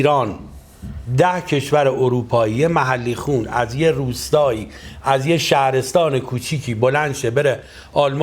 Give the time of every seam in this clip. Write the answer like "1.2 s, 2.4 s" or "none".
none